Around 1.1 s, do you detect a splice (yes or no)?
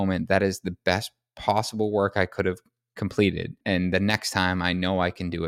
no